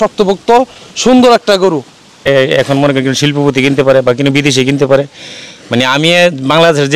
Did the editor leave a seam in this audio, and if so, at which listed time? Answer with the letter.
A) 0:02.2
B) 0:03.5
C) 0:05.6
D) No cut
A